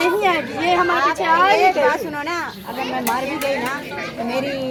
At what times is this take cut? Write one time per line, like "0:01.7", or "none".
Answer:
none